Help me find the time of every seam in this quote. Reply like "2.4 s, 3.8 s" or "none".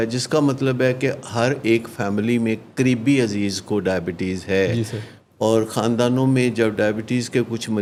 none